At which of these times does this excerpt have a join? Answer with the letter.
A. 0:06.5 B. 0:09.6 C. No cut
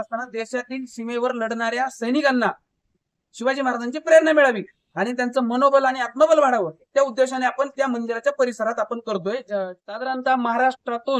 B